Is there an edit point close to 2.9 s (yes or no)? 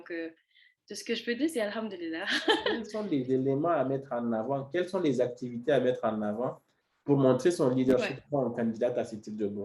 yes